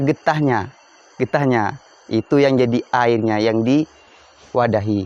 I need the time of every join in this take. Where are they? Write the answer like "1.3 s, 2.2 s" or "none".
none